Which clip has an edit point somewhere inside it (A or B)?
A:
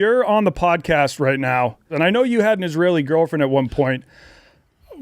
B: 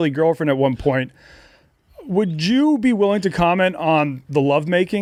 A